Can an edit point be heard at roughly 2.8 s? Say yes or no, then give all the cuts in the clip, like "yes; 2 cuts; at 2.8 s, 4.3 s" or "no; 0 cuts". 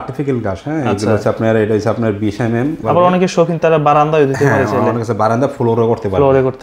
yes; 1 cut; at 2.8 s